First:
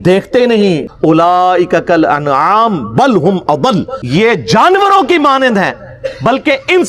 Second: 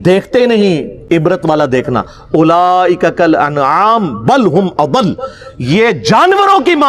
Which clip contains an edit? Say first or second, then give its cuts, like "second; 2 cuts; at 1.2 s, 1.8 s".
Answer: first; 2 cuts; at 1.2 s, 4.0 s